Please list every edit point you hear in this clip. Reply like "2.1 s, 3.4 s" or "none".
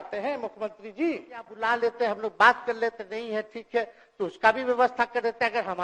1.5 s